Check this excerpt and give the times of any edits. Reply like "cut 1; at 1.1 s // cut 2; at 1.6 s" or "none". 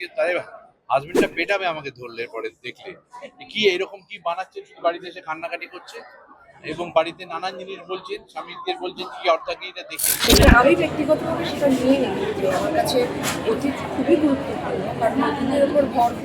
cut 1; at 10.2 s